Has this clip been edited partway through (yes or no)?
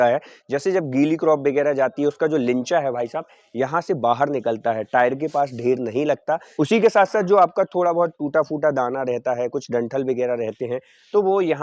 no